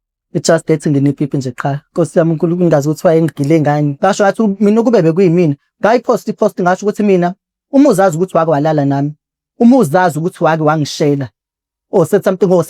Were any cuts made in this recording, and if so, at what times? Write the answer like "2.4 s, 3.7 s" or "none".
3.9 s

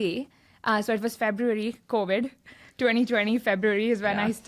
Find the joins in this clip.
none

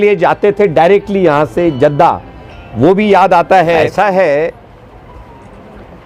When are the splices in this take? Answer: 3.9 s

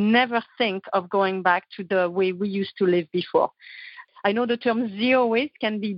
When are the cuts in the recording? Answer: 4.0 s

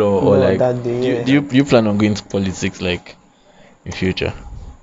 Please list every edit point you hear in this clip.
1.2 s

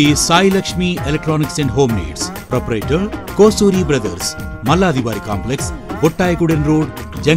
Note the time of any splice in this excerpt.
none

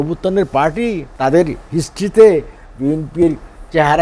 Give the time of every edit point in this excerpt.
1.1 s

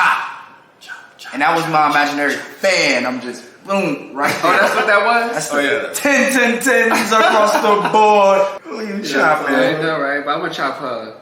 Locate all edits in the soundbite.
8.6 s

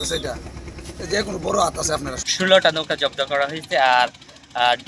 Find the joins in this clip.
2.1 s

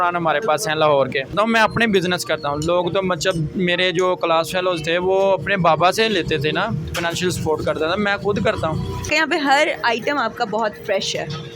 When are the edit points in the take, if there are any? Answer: 1.3 s, 9.1 s

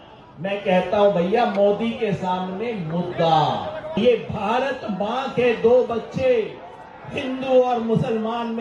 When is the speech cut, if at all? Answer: 4.0 s

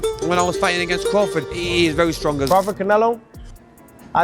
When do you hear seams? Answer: 2.5 s

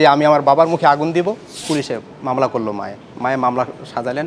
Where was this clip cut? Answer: 1.5 s

